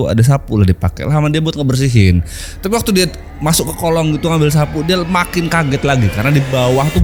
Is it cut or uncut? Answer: uncut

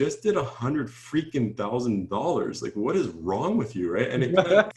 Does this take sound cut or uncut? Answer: uncut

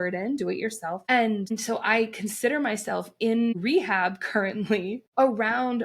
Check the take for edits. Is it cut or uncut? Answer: cut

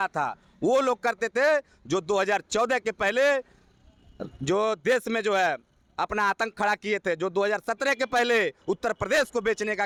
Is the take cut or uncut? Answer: uncut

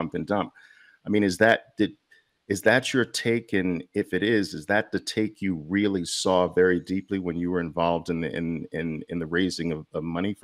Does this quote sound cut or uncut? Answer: uncut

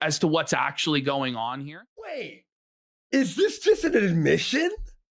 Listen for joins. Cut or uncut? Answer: cut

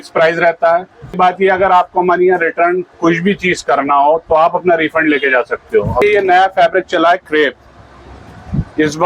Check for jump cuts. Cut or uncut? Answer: cut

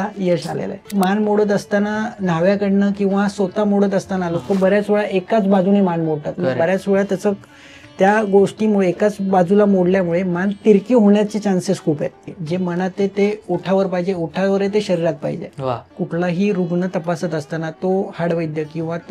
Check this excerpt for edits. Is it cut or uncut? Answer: cut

